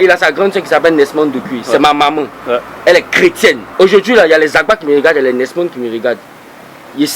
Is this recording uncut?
no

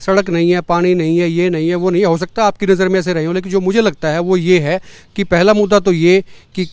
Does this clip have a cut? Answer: no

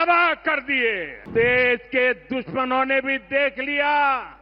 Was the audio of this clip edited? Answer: yes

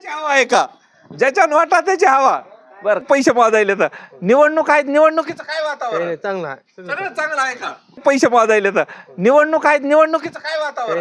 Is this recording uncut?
no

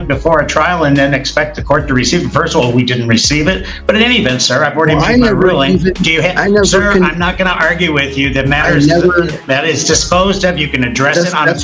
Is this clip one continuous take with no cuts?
yes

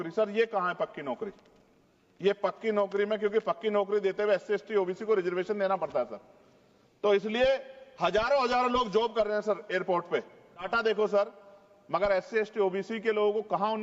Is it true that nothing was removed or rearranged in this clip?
no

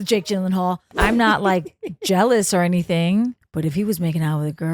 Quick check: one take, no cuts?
no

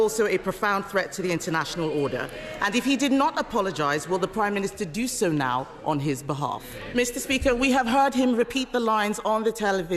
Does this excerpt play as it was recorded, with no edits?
no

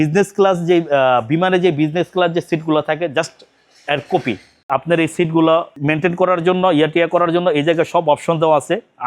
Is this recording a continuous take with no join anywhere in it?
no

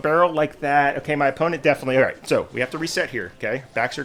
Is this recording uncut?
yes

